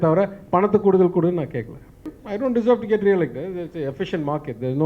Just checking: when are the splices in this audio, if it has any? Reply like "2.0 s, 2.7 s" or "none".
2.1 s